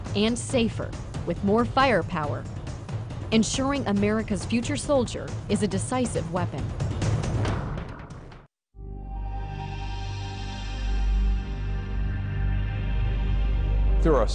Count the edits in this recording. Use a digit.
0